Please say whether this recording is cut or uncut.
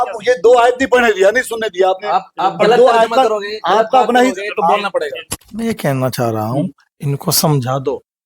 cut